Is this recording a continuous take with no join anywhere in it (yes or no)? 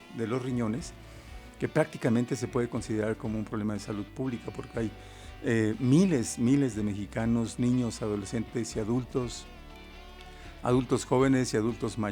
yes